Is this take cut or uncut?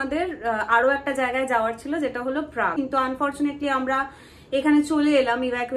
cut